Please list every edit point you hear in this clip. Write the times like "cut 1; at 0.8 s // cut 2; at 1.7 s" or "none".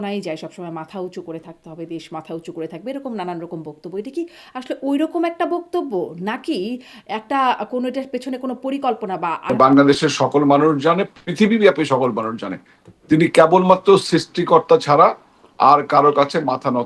cut 1; at 9.4 s